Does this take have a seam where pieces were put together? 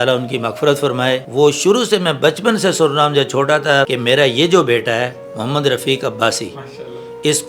yes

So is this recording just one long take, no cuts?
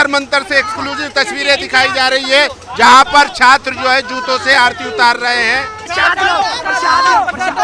no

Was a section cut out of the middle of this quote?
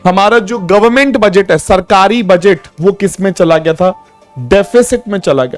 yes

